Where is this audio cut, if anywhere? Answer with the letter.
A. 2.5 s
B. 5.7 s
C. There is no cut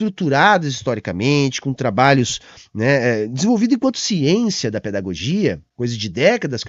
B